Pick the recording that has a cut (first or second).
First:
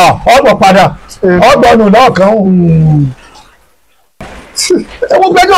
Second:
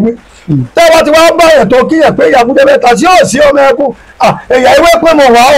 first